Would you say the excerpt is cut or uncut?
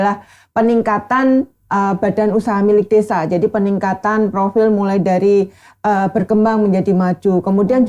uncut